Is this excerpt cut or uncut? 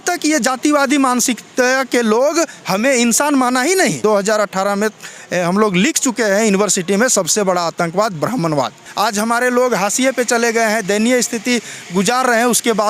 cut